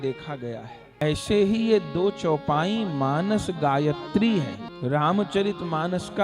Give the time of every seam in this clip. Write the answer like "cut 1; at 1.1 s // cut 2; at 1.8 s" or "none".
cut 1; at 1.0 s // cut 2; at 4.6 s